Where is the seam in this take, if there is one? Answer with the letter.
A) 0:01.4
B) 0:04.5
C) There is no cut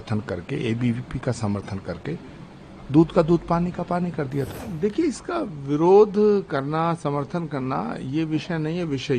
B